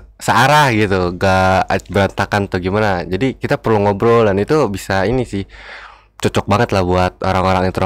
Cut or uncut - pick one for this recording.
uncut